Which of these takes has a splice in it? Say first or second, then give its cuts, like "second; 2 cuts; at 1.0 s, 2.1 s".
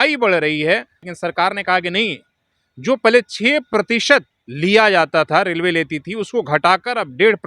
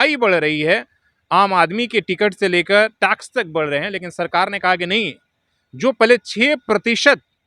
first; 2 cuts; at 1.0 s, 4.4 s